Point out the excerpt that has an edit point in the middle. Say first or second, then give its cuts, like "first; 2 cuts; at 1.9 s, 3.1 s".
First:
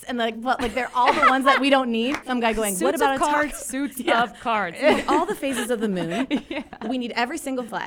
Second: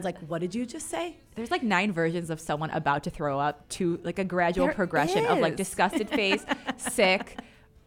first; 1 cut; at 2.3 s